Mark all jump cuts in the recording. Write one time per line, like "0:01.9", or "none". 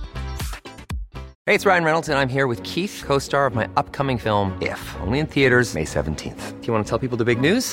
0:01.3